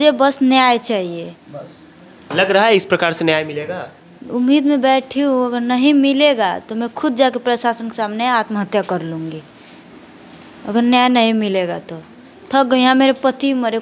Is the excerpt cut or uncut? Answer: uncut